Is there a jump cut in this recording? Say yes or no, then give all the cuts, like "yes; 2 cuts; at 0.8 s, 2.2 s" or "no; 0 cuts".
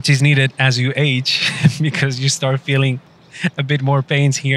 no; 0 cuts